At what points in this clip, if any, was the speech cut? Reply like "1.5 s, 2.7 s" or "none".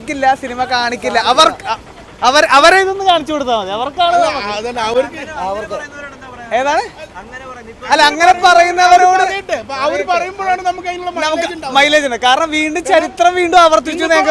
none